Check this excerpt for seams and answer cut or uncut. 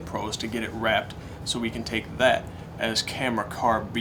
uncut